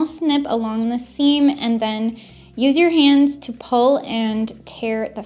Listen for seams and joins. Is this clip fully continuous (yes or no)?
yes